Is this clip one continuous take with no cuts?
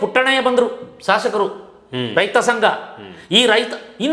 yes; 0 cuts

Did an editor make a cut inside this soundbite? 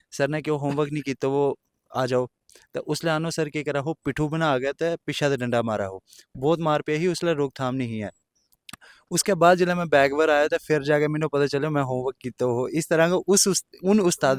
no; 0 cuts

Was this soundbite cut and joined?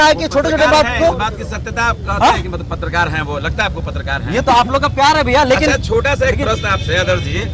no; 0 cuts

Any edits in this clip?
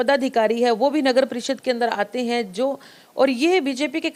no; 0 cuts

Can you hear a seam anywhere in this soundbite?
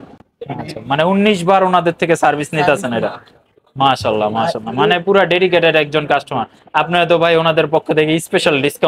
no; 0 cuts

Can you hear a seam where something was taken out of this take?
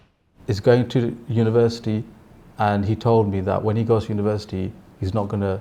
no; 0 cuts

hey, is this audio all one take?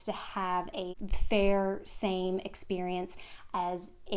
no; 1 cut; at 0.9 s

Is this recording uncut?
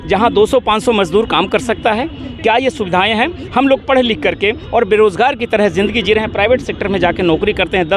yes; 0 cuts

